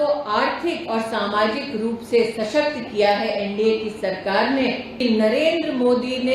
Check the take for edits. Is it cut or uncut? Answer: cut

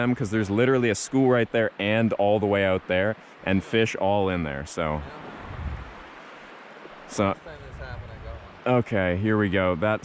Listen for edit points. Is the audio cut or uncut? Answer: uncut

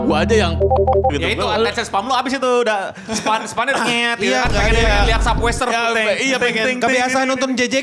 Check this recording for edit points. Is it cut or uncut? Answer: uncut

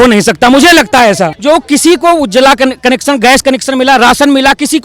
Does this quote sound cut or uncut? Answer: cut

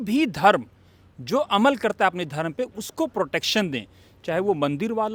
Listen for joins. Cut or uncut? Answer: uncut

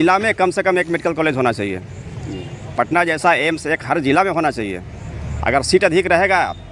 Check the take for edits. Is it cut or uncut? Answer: uncut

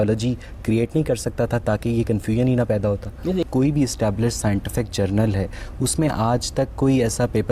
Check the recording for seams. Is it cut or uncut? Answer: cut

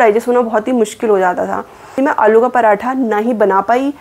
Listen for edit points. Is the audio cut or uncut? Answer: cut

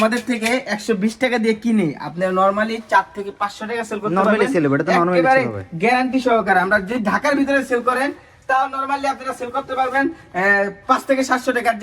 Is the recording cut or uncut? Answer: uncut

